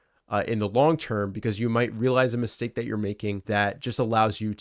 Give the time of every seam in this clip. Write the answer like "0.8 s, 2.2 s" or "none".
3.4 s